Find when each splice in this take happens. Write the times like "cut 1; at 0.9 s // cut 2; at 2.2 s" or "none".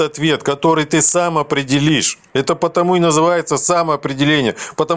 none